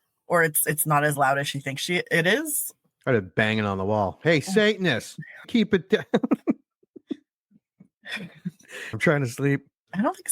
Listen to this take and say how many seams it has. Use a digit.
2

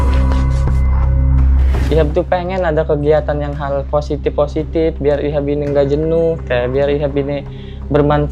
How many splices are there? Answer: 1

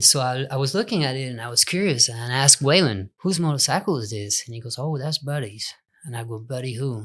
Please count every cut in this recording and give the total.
1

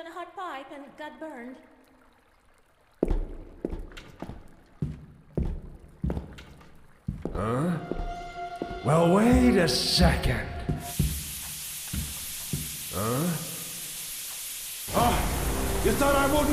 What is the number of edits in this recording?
1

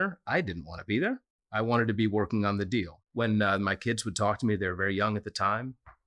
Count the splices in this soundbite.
1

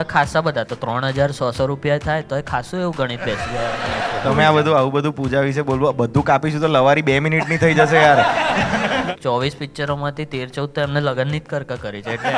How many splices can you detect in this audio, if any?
2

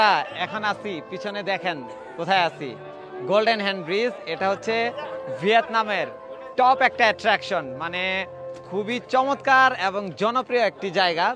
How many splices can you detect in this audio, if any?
0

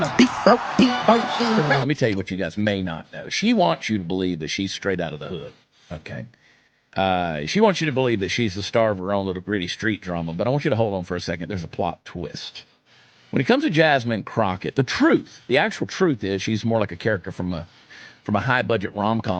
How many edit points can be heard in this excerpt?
0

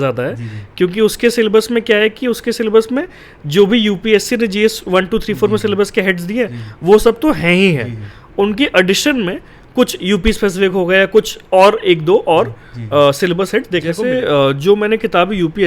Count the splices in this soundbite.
1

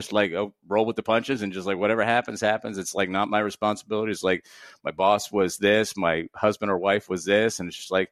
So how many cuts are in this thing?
0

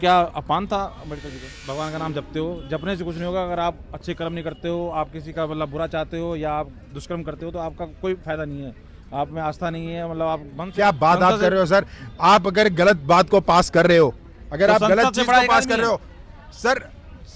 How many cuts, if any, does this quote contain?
2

